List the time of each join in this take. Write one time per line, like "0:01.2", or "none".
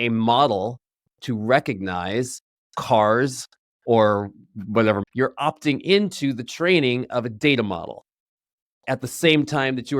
0:05.0